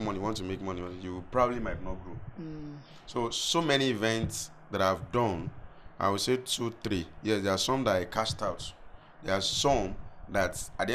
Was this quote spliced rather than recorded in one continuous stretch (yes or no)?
no